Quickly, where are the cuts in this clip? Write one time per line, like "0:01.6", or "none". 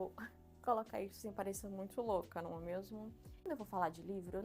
0:03.4